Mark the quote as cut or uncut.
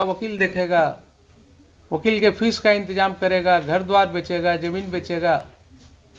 uncut